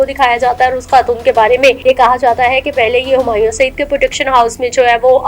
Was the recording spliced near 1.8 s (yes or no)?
yes